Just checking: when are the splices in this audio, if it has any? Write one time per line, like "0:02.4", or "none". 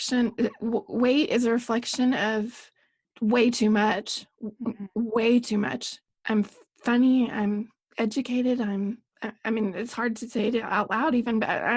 none